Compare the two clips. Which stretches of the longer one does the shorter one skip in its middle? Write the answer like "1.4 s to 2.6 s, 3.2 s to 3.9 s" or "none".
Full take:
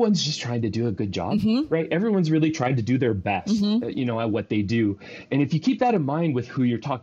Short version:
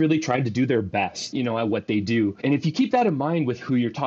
3.5 s to 3.8 s, 5.0 s to 5.2 s